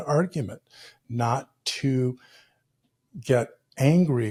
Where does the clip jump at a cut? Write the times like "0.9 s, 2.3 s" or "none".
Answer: none